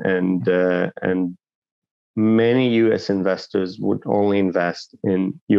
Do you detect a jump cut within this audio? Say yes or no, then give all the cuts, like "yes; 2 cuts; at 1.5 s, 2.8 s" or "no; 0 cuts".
yes; 1 cut; at 1.7 s